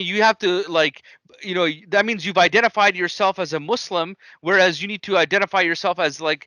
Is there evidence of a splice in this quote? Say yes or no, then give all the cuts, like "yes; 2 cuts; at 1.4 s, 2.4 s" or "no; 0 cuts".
no; 0 cuts